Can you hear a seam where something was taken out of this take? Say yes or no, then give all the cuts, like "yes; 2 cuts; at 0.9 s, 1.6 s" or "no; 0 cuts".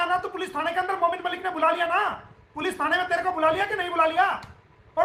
no; 0 cuts